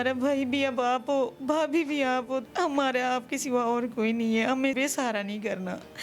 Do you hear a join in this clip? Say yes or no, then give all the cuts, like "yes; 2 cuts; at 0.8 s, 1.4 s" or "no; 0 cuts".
yes; 2 cuts; at 2.4 s, 4.8 s